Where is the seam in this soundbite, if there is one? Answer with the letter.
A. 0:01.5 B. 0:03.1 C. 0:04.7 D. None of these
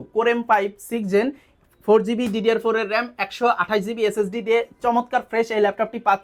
D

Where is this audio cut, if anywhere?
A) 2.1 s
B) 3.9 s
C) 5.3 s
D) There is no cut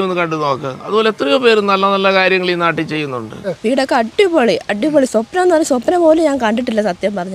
B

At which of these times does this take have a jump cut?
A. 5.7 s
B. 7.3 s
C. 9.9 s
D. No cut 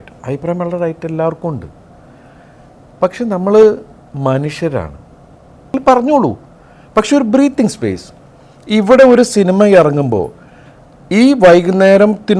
A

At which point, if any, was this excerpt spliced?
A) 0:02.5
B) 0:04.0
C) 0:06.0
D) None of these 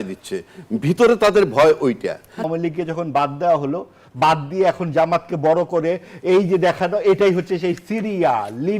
A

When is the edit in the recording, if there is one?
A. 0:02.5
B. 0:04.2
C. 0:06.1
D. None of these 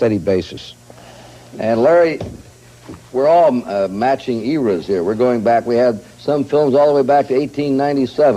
C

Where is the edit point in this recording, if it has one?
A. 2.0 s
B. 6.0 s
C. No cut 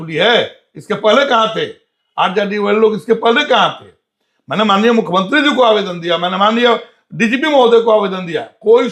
C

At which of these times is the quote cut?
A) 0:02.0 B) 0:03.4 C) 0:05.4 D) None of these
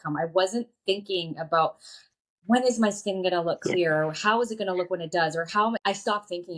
D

